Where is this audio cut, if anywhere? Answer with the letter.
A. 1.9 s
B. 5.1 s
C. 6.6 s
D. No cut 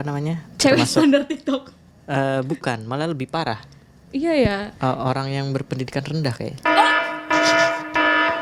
D